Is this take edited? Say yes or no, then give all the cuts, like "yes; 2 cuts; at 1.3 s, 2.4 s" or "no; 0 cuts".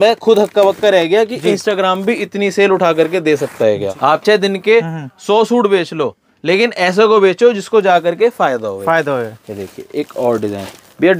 yes; 1 cut; at 3.9 s